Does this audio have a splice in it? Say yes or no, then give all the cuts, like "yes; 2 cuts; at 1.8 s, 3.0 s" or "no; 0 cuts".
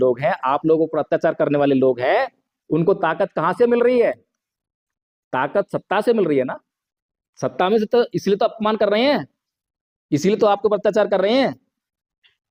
no; 0 cuts